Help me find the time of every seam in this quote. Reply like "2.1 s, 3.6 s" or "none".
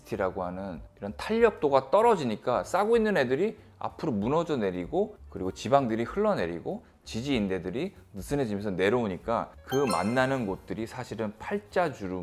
none